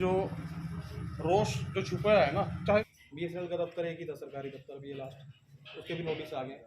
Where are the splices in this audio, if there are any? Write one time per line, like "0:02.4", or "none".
0:02.8